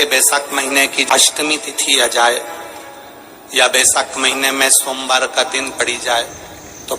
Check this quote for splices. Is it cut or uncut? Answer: cut